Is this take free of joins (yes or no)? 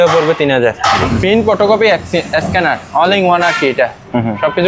no